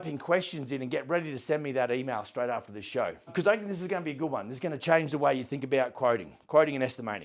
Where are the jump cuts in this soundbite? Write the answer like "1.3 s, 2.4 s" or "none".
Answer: 3.3 s